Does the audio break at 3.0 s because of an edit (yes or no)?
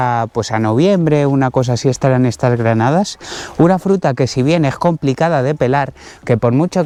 no